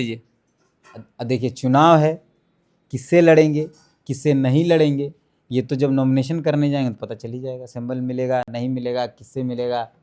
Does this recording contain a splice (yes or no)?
no